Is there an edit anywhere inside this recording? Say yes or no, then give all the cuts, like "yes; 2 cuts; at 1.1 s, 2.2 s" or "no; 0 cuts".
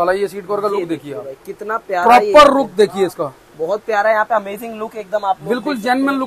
no; 0 cuts